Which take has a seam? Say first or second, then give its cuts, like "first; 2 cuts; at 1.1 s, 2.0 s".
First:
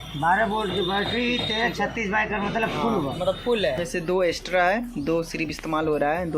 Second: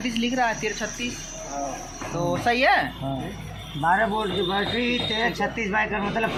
first; 1 cut; at 3.8 s